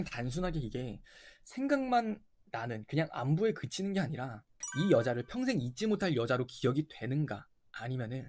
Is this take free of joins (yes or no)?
yes